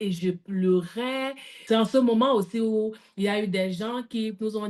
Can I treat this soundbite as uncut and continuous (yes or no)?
no